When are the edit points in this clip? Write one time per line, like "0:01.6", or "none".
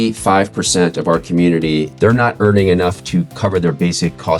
0:01.9
0:03.3